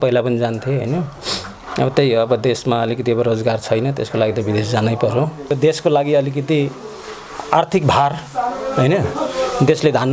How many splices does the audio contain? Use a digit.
1